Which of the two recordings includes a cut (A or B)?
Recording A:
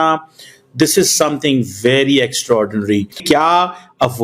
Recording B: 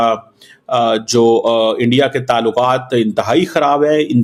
A